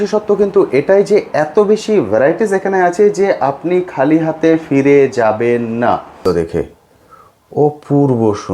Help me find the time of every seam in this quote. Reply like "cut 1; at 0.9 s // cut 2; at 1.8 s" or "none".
cut 1; at 6.2 s